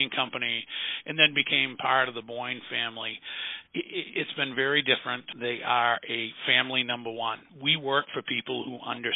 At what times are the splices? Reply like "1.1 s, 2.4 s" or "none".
5.3 s, 7.5 s